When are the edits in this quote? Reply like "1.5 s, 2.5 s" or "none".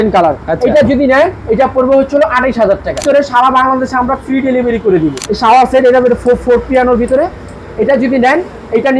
3.0 s, 5.2 s